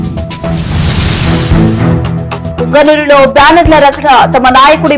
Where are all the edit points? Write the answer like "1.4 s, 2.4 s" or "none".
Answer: 2.5 s